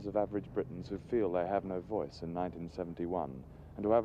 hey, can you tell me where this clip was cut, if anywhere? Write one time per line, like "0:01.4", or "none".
0:02.0